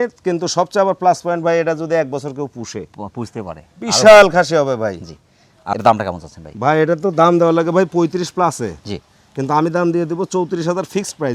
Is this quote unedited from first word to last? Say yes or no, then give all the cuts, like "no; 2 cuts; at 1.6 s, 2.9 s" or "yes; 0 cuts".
yes; 0 cuts